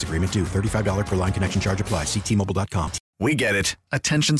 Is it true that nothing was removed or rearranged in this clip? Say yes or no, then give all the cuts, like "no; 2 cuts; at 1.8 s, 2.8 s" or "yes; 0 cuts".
no; 1 cut; at 3.0 s